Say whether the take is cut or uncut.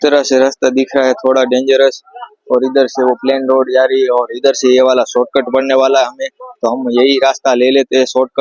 uncut